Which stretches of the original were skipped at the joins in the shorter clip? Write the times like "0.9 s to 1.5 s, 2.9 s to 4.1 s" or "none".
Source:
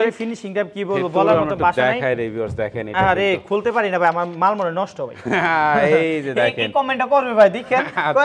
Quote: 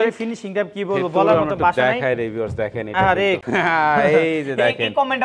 3.4 s to 5.2 s